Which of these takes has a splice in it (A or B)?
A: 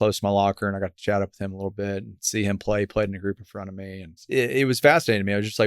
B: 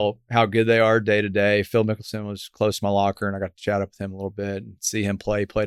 A